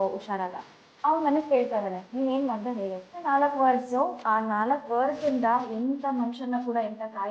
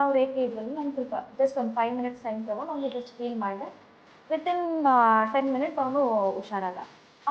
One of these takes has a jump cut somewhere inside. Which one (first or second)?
first